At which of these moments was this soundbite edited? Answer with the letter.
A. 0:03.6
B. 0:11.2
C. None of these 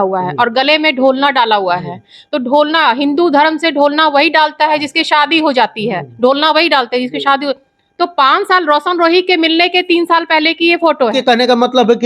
B